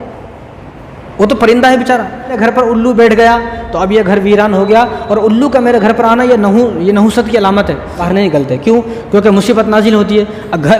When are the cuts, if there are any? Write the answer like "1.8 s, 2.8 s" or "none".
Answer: 2.4 s, 8.0 s